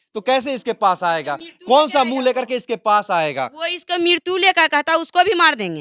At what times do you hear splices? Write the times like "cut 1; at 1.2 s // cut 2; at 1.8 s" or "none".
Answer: none